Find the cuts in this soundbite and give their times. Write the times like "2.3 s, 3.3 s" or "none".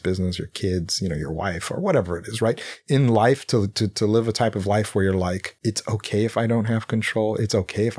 5.5 s